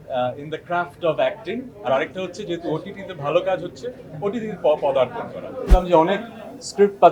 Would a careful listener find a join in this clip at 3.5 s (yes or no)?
no